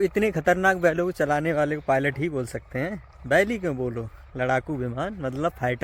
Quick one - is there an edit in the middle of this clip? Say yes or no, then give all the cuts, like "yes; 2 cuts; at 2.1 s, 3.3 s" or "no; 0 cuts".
no; 0 cuts